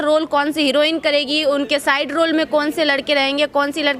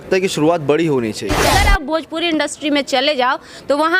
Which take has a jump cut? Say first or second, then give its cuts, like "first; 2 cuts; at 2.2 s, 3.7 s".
second; 1 cut; at 1.4 s